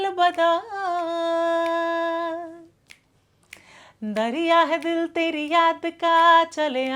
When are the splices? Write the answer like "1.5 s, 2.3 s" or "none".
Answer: none

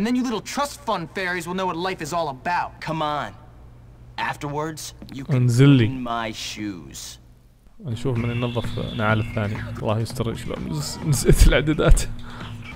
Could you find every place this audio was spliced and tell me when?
2.8 s, 7.6 s, 9.7 s

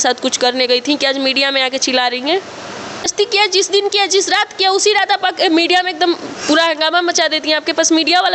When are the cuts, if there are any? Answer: 3.0 s

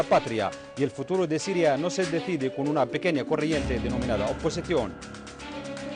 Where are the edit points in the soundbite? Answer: none

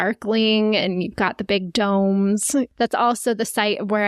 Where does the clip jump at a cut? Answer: 2.7 s

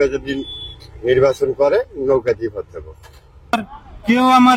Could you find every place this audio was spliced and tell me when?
3.5 s

